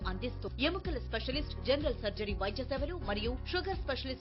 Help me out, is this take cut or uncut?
uncut